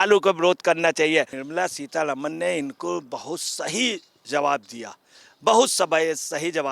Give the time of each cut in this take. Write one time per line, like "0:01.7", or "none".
0:01.4